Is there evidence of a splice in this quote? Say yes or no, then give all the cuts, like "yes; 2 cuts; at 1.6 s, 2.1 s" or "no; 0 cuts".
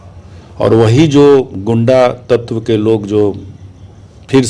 no; 0 cuts